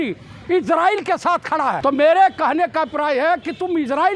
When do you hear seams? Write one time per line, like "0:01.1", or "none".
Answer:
0:01.8